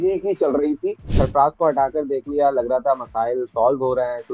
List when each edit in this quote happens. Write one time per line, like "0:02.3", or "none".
0:01.1